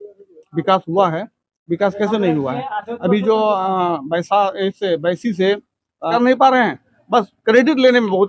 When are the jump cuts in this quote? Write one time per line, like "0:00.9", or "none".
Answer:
0:06.1